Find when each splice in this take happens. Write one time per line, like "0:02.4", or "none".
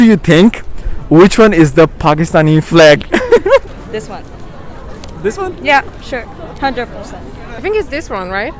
0:03.7
0:07.5

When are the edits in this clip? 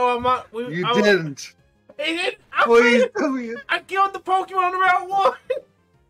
0:03.6

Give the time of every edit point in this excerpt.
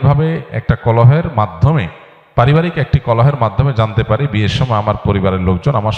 none

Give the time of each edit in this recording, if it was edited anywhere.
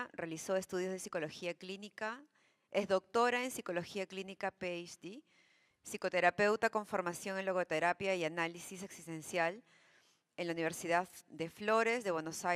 none

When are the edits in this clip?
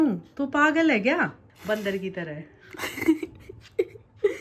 0:01.5

